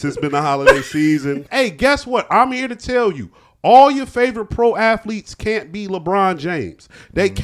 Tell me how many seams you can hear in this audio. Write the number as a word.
one